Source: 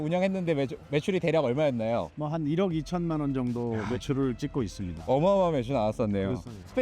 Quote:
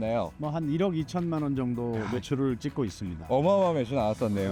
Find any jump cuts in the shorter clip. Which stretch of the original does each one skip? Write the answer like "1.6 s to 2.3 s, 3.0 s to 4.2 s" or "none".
none

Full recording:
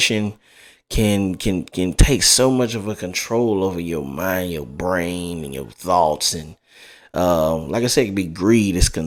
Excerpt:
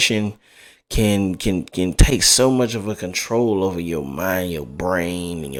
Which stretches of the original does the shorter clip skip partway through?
none

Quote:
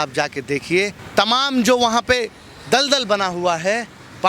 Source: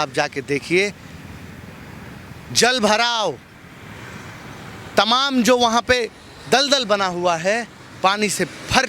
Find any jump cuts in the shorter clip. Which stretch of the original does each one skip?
1.0 s to 4.8 s

